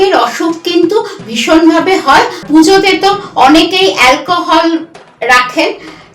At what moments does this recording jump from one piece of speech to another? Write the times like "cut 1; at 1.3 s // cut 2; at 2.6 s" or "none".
cut 1; at 2.4 s